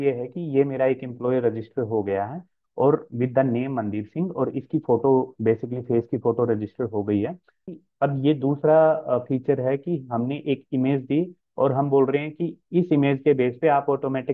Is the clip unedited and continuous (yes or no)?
no